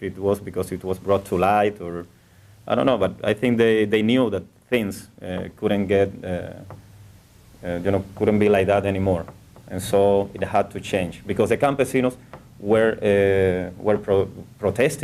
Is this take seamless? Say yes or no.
no